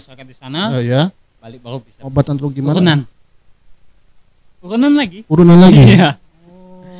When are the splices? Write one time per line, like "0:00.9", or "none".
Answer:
0:02.1